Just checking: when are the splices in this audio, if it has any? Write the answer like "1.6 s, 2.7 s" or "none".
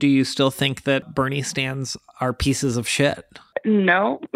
1.0 s, 3.5 s